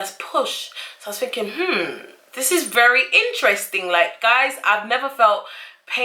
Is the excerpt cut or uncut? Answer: cut